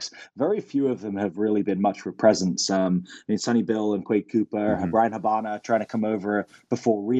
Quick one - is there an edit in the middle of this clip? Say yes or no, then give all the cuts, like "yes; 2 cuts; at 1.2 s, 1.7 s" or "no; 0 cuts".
no; 0 cuts